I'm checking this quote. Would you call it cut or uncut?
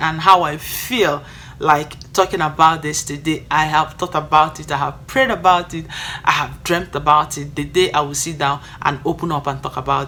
uncut